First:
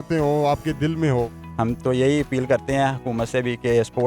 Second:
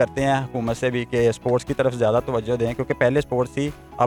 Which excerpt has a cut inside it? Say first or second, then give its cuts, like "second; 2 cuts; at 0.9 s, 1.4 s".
first; 1 cut; at 1.4 s